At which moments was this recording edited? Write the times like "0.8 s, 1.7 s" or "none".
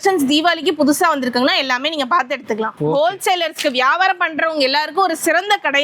2.7 s